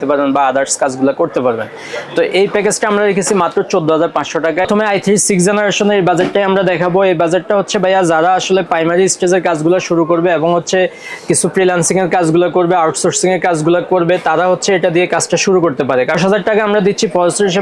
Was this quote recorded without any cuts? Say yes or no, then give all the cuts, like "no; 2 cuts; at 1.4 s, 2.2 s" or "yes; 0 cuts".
no; 2 cuts; at 4.7 s, 16.2 s